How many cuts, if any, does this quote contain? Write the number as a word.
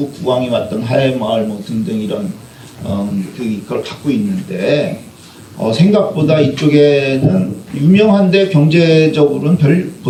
zero